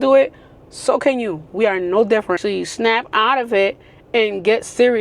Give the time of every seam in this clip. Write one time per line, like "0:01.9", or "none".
0:02.4